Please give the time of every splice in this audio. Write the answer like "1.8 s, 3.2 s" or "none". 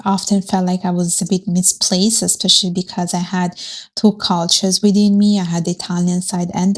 none